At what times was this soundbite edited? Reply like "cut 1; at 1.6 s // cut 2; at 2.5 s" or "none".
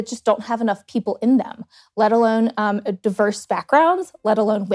none